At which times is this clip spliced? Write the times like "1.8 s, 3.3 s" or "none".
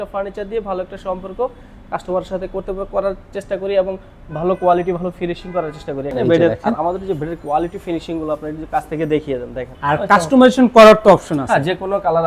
6.1 s, 9.6 s